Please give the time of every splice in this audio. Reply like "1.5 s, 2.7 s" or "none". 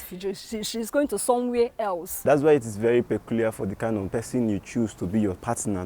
2.1 s, 4.1 s